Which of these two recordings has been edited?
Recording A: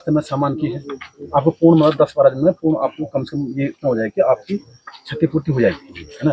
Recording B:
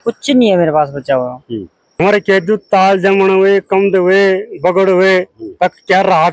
B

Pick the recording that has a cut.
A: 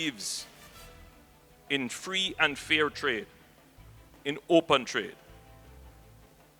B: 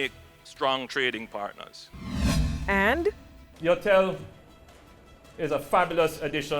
B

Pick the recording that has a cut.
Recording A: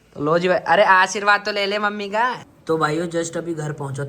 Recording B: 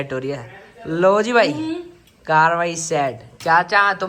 A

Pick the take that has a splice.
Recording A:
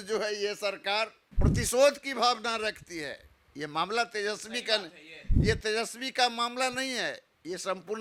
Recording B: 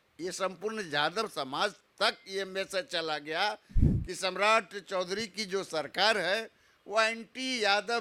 A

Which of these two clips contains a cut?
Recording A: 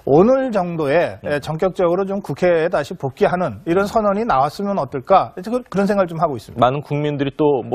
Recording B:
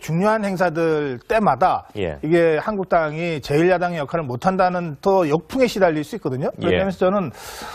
B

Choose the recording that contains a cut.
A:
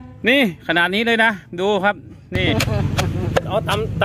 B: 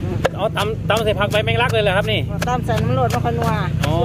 A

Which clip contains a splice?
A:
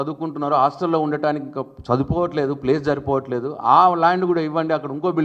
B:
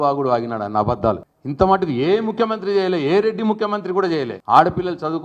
B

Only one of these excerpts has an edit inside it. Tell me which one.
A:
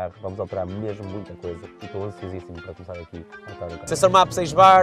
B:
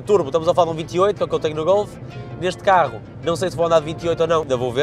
A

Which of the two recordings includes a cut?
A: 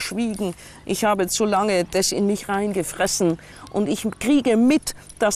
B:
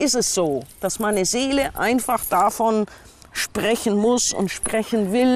A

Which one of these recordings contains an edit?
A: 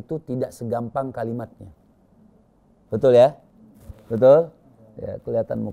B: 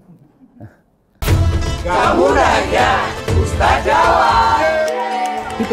B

